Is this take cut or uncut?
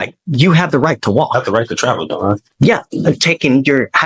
uncut